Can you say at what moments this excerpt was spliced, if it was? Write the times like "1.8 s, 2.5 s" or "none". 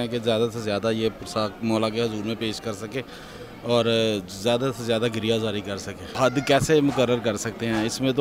6.1 s